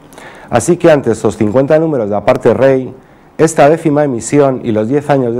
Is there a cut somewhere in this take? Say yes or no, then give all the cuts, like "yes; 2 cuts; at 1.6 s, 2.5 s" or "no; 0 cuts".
yes; 1 cut; at 3.8 s